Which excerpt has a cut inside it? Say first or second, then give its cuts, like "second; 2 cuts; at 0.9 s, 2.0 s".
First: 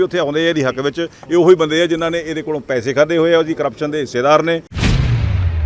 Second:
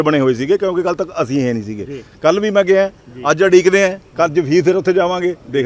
first; 1 cut; at 4.7 s